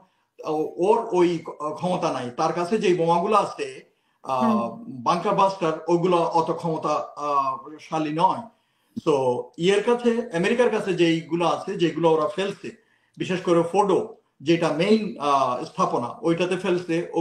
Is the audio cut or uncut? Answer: uncut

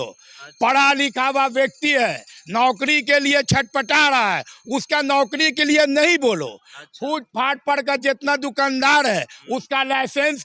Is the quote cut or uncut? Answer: uncut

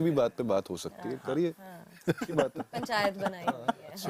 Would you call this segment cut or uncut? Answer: uncut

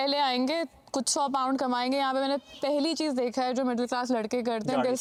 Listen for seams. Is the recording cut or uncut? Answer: uncut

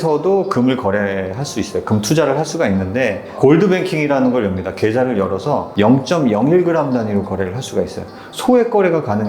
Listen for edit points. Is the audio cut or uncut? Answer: cut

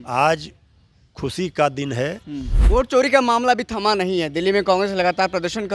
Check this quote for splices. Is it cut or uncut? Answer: cut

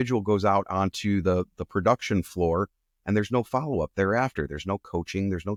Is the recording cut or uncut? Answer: uncut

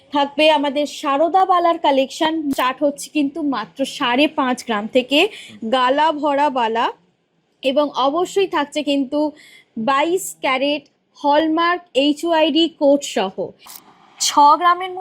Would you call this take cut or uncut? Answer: cut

